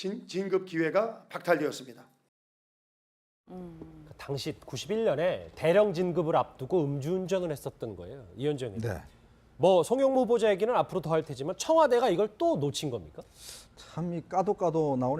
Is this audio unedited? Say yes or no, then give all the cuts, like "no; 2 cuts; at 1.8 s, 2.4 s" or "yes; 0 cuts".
no; 1 cut; at 9.0 s